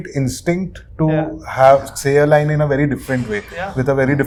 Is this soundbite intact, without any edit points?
yes; 0 cuts

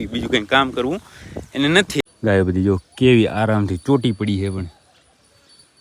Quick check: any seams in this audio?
yes; 1 cut; at 2.0 s

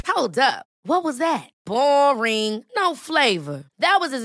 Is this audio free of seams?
yes; 0 cuts

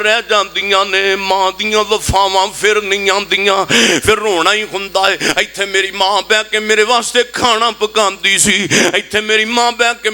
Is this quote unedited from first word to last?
yes; 0 cuts

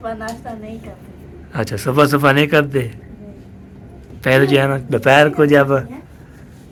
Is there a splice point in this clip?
no; 0 cuts

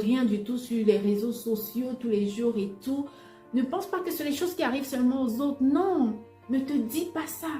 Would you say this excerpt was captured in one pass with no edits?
no; 1 cut; at 6.3 s

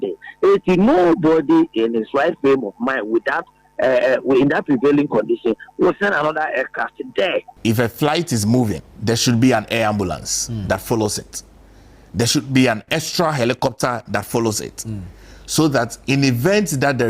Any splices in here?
yes; 2 cuts; at 7.5 s, 8.9 s

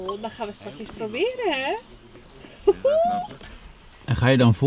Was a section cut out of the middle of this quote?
no; 0 cuts

